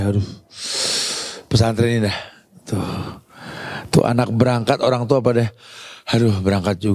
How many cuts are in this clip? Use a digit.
0